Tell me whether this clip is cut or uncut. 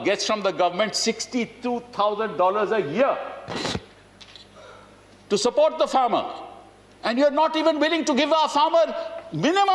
uncut